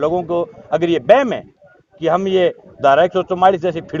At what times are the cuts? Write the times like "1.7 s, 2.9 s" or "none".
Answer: none